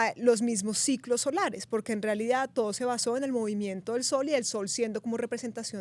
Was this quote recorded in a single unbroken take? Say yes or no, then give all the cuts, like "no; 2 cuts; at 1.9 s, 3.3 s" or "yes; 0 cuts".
yes; 0 cuts